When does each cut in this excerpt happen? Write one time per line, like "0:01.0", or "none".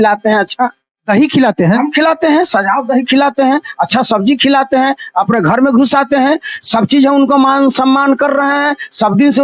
none